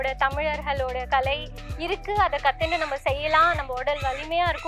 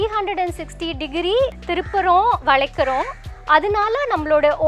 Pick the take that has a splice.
second; 1 cut; at 1.6 s

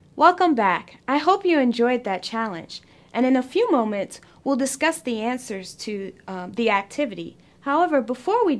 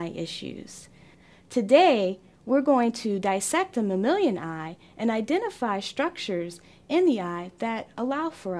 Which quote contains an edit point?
second; 1 cut; at 7.4 s

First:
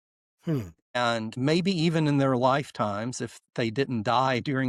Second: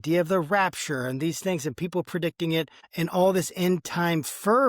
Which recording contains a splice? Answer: second; 1 cut; at 2.8 s

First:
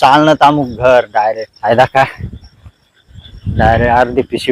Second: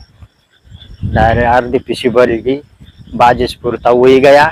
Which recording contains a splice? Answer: first; 1 cut; at 1.5 s

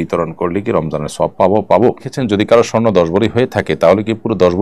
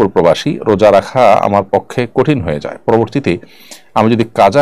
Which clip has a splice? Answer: first; 1 cut; at 2.1 s

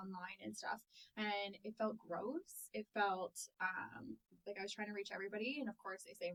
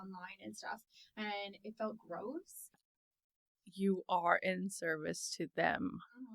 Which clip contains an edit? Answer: second; 1 cut; at 2.8 s

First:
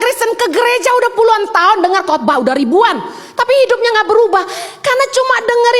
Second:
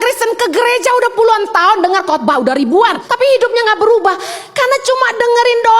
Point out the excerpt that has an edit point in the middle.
second; 1 cut; at 3.0 s

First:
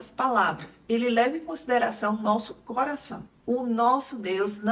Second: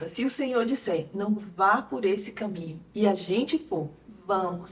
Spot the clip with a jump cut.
first; 1 cut; at 3.2 s

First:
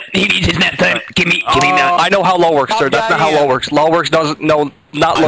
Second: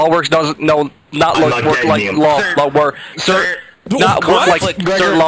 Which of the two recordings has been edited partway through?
first; 1 cut; at 2.0 s

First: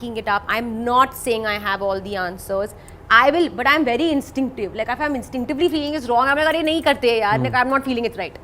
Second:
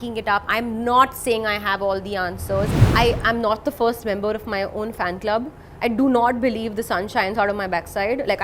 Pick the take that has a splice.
second; 1 cut; at 2.8 s

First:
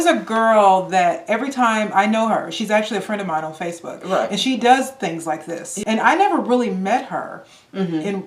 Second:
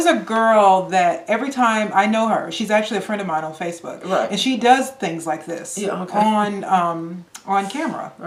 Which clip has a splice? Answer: first; 1 cut; at 5.7 s

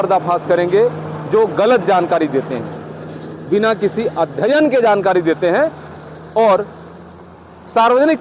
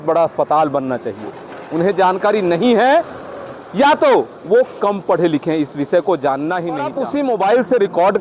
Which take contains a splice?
second; 1 cut; at 6.9 s

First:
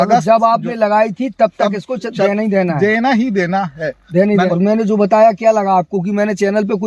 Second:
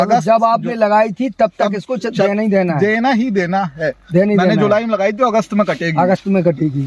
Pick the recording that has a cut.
first; 1 cut; at 4.5 s

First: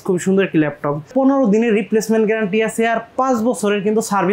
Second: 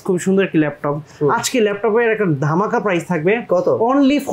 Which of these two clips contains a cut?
first; 1 cut; at 1.1 s

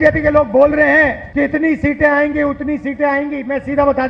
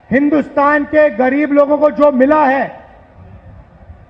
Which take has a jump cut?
first; 1 cut; at 1.2 s

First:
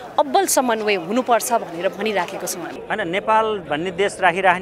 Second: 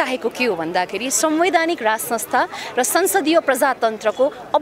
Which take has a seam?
first; 1 cut; at 2.7 s

